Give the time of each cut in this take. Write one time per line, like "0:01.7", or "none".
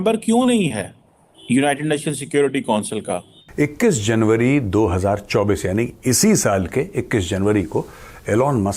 0:03.4